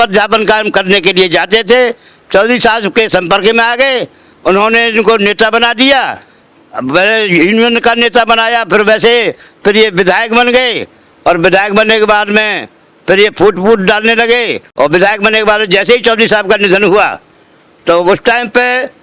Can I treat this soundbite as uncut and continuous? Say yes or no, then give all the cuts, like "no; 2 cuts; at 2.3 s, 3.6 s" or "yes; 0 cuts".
no; 1 cut; at 14.6 s